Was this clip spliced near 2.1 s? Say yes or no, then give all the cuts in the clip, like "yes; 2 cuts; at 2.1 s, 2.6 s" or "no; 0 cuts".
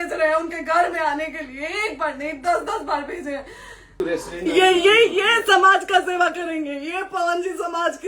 no; 1 cut; at 4.0 s